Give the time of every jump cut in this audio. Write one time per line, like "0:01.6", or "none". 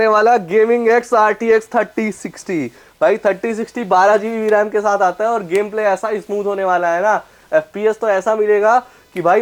none